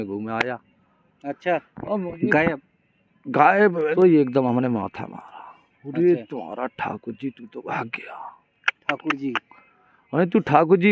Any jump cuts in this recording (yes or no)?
yes